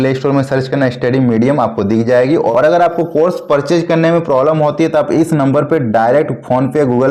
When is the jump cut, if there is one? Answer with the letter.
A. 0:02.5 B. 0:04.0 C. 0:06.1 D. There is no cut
A